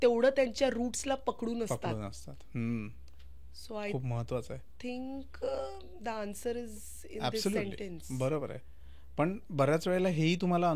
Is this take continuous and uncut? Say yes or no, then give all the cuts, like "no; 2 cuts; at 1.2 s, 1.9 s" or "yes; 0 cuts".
yes; 0 cuts